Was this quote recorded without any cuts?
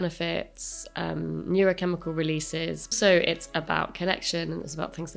no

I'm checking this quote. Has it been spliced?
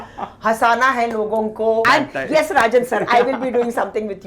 yes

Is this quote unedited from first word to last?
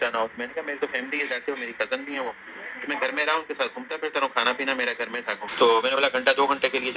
no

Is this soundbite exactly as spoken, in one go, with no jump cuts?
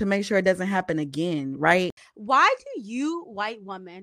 no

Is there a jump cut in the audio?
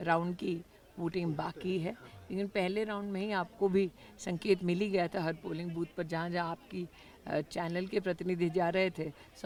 no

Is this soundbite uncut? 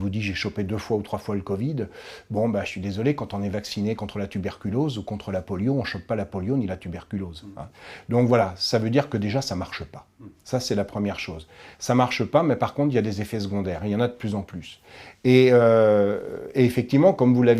yes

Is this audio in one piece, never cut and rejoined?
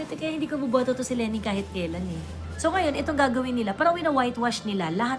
no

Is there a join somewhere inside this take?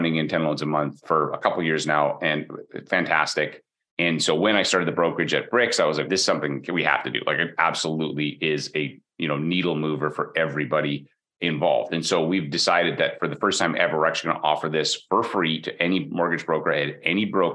no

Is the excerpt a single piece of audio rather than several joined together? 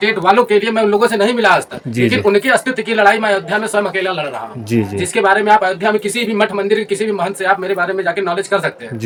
yes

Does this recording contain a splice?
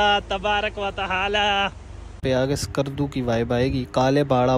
yes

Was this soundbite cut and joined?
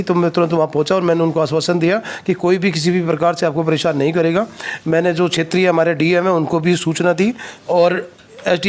no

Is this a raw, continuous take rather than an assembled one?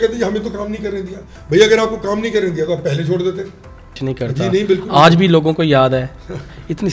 no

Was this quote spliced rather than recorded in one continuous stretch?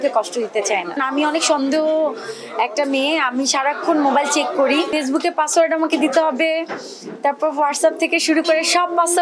yes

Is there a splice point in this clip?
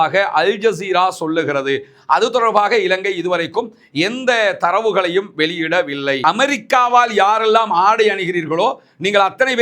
yes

